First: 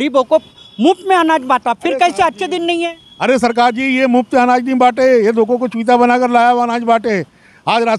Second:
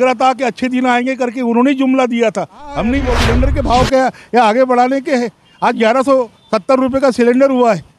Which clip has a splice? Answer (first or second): second